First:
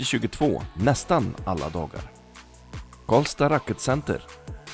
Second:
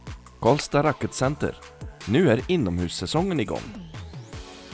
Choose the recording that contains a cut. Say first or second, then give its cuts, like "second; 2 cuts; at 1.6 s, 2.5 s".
second; 1 cut; at 3.6 s